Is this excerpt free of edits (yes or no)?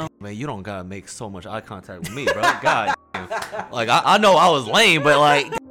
yes